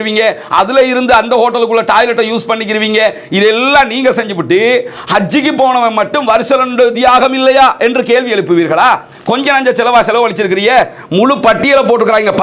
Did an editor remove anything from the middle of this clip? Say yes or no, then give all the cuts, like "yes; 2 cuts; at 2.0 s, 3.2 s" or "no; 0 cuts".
no; 0 cuts